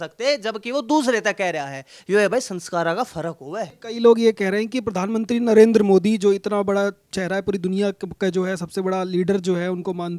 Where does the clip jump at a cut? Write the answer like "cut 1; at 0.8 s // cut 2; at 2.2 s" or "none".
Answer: cut 1; at 3.8 s